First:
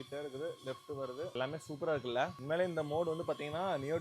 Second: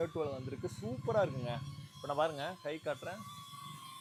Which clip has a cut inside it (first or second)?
first